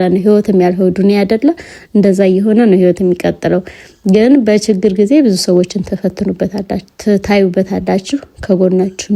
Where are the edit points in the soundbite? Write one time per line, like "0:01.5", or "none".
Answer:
none